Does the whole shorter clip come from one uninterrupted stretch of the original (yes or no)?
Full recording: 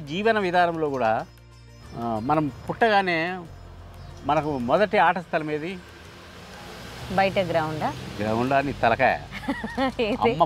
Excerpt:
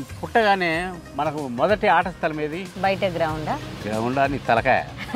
no